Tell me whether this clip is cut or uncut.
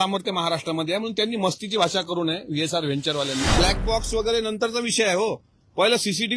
cut